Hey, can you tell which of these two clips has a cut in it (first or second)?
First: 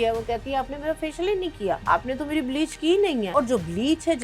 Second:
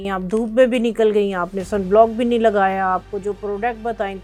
first